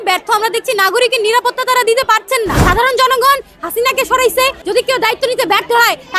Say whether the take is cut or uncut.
cut